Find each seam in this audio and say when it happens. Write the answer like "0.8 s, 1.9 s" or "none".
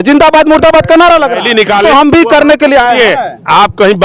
1.8 s